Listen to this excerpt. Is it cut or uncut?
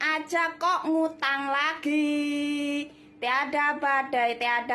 uncut